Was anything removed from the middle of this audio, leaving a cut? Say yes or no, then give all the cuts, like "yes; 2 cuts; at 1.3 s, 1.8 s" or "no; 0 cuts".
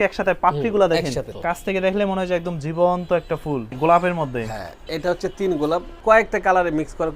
yes; 3 cuts; at 1.4 s, 3.7 s, 5.9 s